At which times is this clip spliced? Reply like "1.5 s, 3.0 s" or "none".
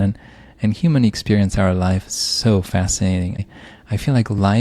3.4 s